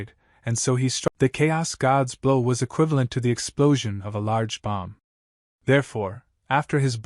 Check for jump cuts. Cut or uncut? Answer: cut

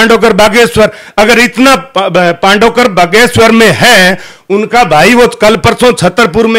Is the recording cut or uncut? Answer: uncut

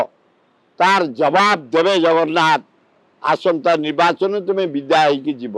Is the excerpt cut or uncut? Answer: uncut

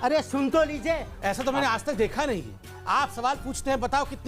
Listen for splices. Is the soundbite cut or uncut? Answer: cut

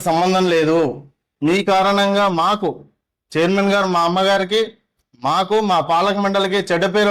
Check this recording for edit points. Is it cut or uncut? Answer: cut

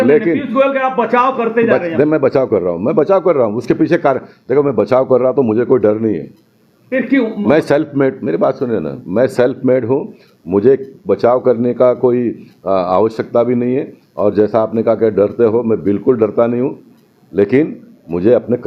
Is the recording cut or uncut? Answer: uncut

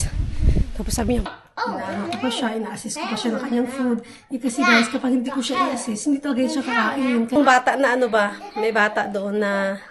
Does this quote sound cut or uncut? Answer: cut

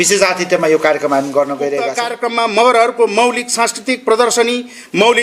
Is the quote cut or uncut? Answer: cut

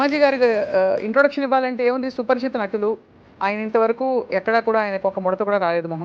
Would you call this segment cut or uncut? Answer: uncut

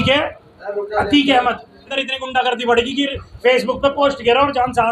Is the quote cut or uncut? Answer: cut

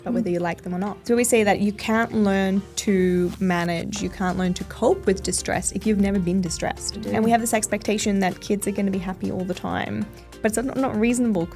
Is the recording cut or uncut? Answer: cut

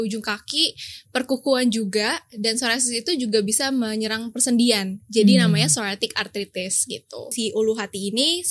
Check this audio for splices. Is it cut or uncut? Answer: cut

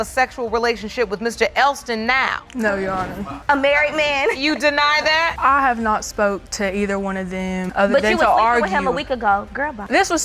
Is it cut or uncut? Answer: uncut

